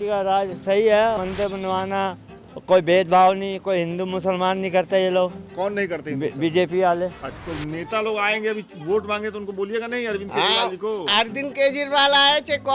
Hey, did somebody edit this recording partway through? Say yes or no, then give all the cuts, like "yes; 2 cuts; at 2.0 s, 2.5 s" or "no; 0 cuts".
yes; 2 cuts; at 1.2 s, 7.3 s